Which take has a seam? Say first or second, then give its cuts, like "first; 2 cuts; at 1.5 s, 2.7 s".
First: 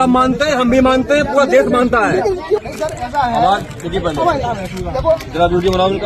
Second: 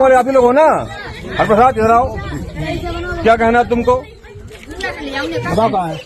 first; 1 cut; at 2.6 s